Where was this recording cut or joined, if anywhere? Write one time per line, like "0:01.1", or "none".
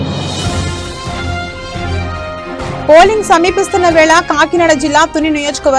none